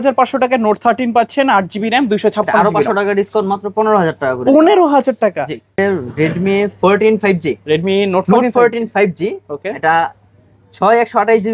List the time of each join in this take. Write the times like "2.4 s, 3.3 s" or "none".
5.8 s